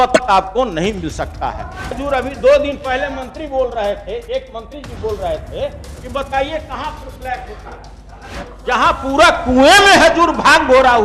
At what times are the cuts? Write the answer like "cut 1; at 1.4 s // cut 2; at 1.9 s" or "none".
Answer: cut 1; at 2.0 s // cut 2; at 8.5 s